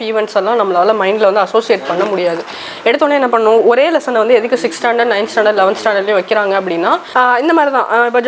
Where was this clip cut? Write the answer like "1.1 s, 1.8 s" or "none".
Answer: 7.1 s